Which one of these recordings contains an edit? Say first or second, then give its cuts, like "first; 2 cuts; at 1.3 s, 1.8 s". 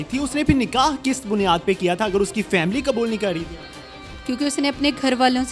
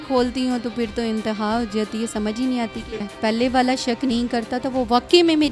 second; 1 cut; at 3.1 s